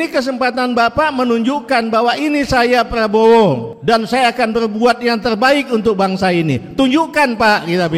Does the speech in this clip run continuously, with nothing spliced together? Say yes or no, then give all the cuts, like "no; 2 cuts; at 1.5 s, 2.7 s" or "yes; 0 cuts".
no; 1 cut; at 3.7 s